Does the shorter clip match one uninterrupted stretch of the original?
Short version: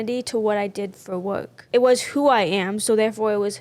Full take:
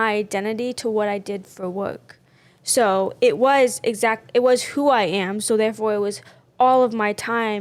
no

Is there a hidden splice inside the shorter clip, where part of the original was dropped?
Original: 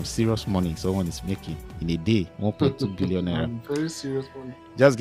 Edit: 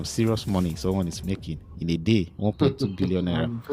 no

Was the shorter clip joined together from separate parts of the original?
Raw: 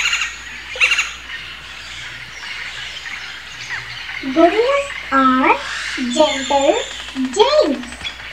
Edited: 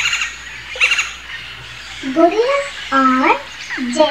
yes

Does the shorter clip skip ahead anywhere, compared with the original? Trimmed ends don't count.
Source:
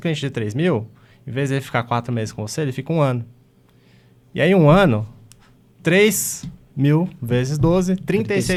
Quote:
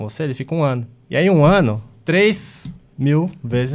yes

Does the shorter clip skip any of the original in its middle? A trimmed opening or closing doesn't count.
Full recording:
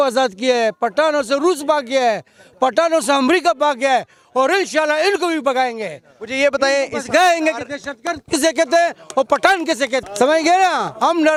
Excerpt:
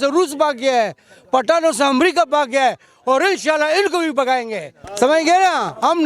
yes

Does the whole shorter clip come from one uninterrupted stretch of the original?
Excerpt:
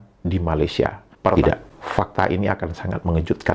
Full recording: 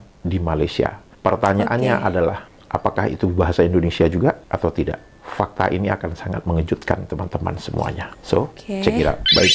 no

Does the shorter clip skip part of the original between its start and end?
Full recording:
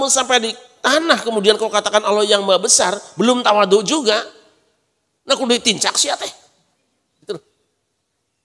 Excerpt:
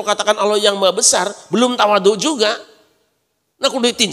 no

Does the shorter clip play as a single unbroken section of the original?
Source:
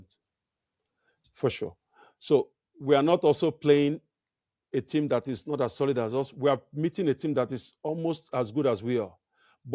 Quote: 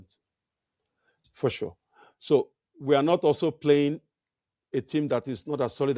yes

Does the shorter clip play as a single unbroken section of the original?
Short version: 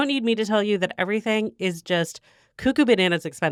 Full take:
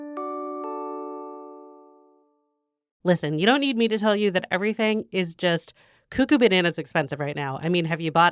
yes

